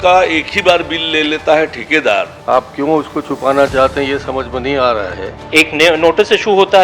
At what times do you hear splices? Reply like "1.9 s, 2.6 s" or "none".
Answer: 2.3 s, 5.3 s